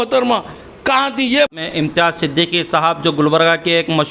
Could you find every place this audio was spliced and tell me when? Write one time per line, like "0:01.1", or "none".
0:01.5